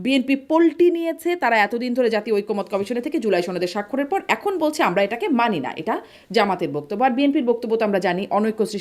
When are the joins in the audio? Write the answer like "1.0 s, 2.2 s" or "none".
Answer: none